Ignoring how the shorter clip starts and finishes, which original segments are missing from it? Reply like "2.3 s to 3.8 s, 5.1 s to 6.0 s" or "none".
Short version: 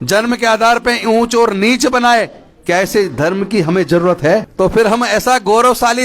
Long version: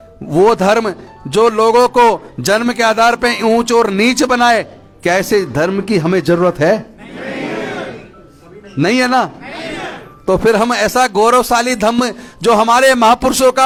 6.9 s to 10.2 s